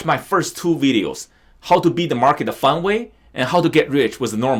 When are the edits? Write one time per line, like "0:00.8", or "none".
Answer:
none